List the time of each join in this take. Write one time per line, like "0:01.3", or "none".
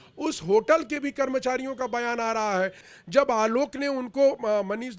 0:02.9